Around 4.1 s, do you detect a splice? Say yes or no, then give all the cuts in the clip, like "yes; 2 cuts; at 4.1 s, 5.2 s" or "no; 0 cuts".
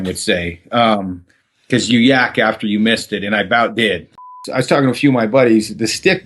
yes; 1 cut; at 4.1 s